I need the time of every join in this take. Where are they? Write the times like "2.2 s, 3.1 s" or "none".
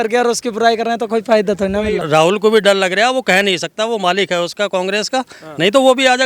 2.0 s